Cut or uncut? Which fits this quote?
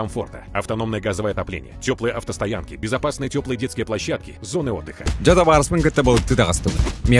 cut